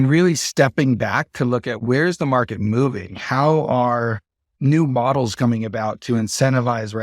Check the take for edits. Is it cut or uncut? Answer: uncut